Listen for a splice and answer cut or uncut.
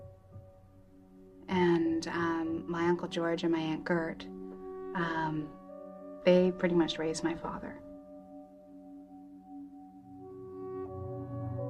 uncut